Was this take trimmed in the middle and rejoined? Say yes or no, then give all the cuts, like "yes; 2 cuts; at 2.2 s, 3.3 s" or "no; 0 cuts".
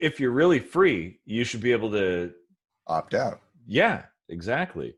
no; 0 cuts